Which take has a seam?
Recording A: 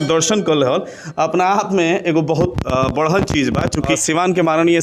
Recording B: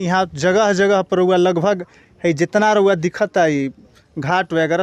A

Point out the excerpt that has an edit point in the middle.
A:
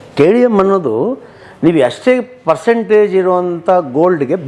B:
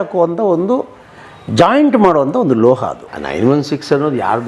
B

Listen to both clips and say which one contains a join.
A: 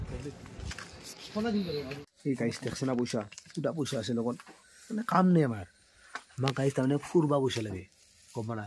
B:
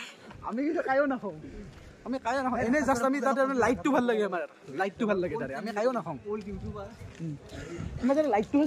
A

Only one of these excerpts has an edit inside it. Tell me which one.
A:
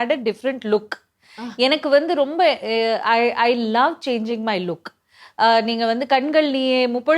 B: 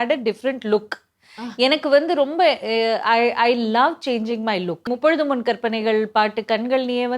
B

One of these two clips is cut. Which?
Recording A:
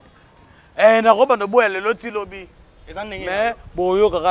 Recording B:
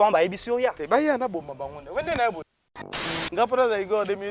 B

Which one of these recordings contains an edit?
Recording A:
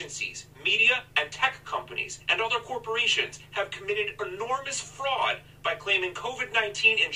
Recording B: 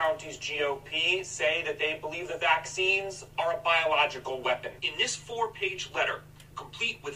B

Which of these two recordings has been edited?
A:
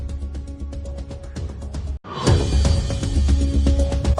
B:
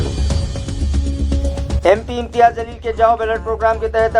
B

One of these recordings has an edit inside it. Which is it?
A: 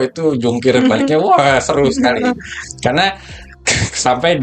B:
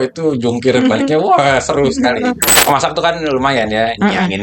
B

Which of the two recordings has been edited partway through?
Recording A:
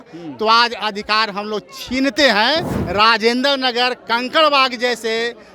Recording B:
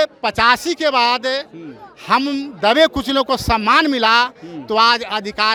A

